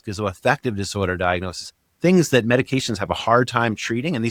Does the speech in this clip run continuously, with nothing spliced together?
yes; 0 cuts

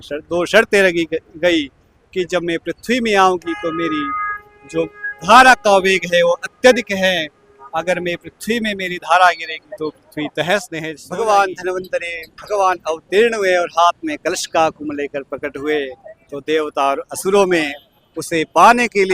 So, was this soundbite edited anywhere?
yes; 1 cut; at 11.0 s

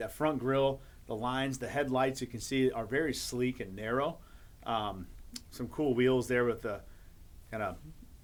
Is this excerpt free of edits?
yes; 0 cuts

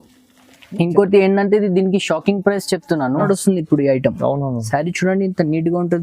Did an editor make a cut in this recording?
yes; 1 cut; at 3.3 s

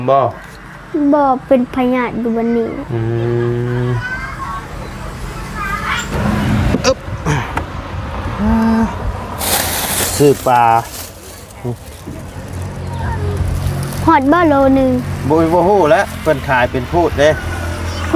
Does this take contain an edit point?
yes; 1 cut; at 6.1 s

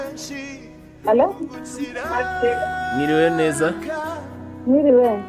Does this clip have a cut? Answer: no; 0 cuts

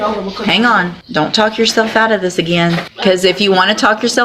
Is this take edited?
yes; 2 cuts; at 1.0 s, 2.9 s

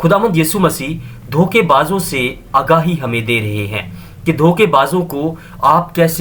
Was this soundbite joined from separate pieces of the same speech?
no; 0 cuts

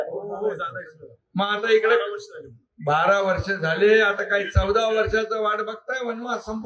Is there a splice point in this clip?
no; 0 cuts

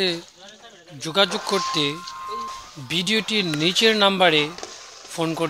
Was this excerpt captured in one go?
yes; 0 cuts

